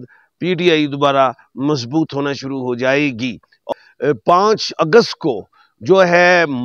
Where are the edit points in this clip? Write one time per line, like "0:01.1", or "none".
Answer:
0:03.6